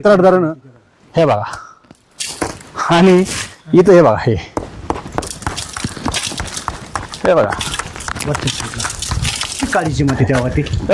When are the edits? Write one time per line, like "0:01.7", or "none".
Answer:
none